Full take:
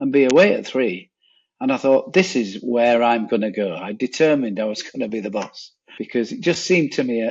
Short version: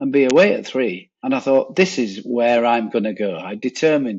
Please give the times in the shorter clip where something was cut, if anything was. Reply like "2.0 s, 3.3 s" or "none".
1.1 s